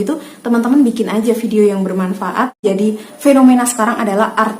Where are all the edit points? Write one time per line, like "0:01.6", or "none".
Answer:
0:02.6